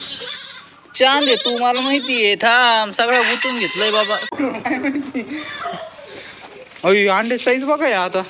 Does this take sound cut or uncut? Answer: cut